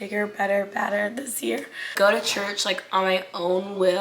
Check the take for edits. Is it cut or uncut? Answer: cut